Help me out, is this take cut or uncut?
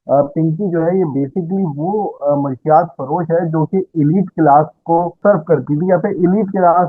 cut